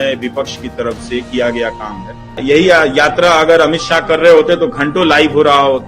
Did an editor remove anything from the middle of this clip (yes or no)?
yes